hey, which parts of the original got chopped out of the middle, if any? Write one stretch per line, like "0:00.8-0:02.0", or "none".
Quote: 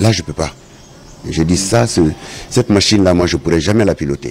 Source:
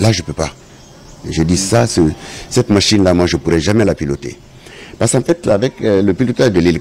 none